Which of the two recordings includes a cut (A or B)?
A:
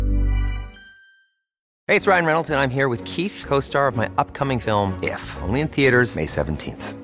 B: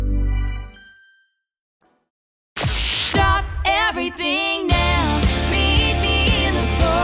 A